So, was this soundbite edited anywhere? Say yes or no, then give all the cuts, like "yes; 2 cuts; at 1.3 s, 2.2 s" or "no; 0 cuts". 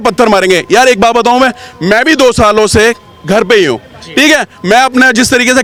no; 0 cuts